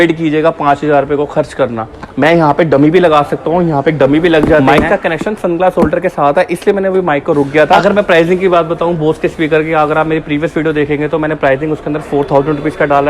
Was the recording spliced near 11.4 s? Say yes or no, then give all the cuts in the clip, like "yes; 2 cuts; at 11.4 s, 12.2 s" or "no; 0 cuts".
no; 2 cuts; at 4.6 s, 7.8 s